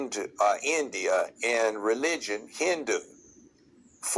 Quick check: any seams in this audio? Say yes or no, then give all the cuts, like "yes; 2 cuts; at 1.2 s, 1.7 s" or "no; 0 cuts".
no; 0 cuts